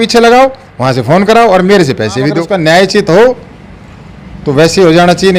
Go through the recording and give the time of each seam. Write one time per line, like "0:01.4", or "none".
0:02.5